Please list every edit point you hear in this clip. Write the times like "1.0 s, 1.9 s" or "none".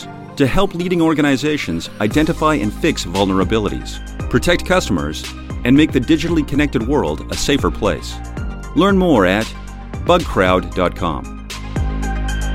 11.5 s